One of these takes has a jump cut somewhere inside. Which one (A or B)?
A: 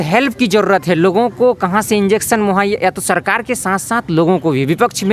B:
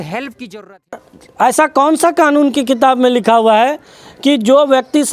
B